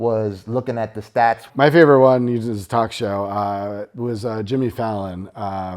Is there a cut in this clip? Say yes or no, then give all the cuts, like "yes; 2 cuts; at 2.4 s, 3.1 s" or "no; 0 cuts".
yes; 1 cut; at 1.5 s